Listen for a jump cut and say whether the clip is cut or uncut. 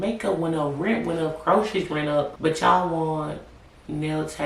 cut